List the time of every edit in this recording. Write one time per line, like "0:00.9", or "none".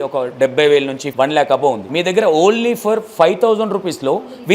0:01.0
0:01.8